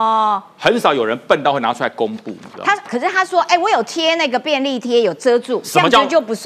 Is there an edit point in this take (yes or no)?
no